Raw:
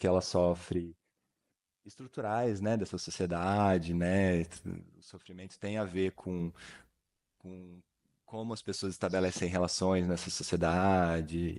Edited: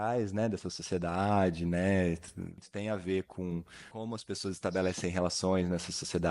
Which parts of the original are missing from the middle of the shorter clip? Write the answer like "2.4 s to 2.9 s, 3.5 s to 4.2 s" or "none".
4.9 s to 5.5 s, 6.7 s to 8.2 s

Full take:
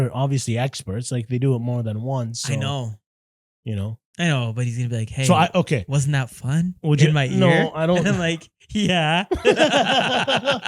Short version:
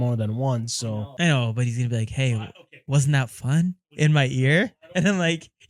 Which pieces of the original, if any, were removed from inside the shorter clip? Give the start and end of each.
2.6 s to 3.9 s

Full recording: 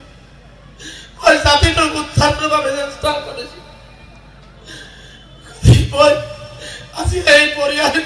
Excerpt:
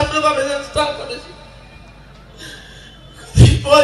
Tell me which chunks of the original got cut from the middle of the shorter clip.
none

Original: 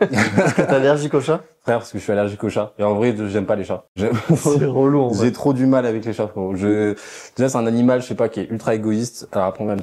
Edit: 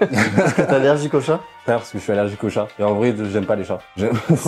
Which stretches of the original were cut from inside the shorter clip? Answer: none

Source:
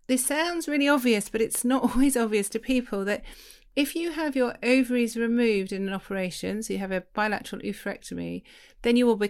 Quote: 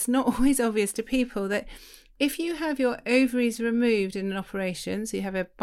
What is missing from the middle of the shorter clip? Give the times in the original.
none

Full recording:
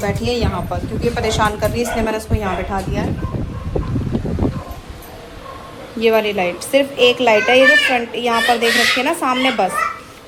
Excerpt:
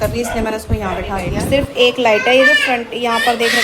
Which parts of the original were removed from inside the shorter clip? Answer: 3.1 s to 6.7 s

